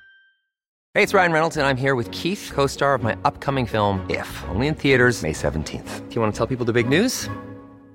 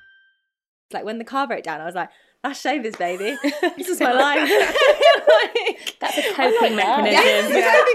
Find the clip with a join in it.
second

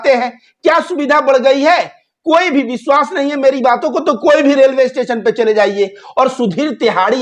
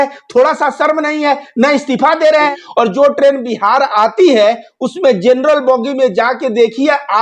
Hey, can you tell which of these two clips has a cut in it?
second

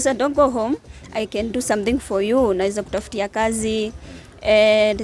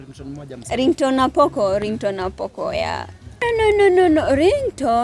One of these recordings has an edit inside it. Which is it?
second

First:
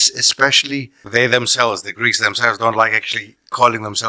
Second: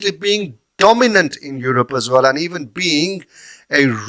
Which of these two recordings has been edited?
first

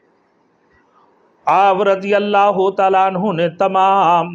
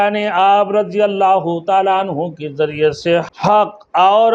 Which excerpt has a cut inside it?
second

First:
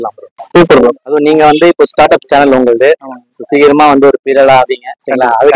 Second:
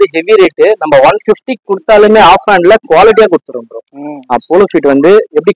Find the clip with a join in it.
second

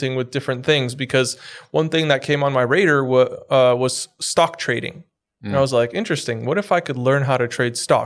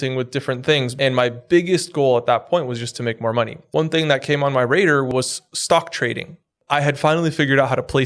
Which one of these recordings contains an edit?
second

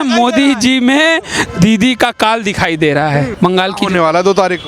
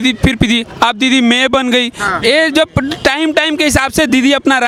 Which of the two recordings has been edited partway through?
first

